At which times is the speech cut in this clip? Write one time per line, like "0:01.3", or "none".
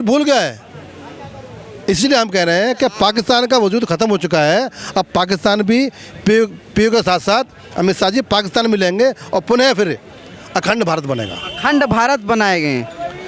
none

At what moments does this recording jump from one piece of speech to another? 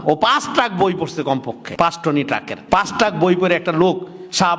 0:01.6
0:02.5

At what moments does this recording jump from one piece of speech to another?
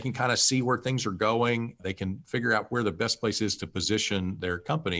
0:01.8

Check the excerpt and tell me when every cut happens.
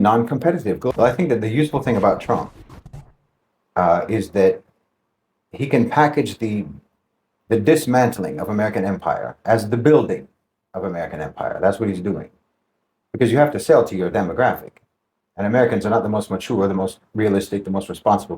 0:00.9

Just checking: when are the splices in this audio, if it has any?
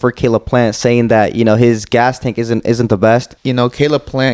0:03.4

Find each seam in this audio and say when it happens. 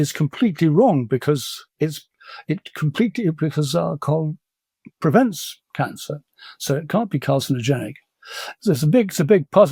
none

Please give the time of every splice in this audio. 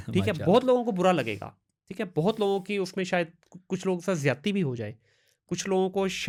none

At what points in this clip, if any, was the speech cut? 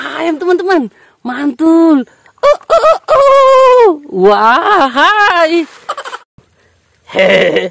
0:06.2

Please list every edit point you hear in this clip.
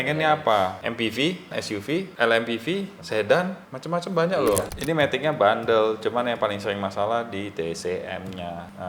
0:04.7

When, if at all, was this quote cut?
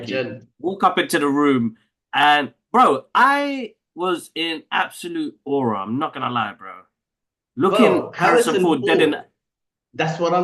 none

